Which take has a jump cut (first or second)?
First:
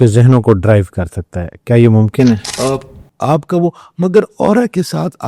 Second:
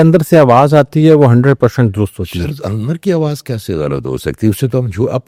first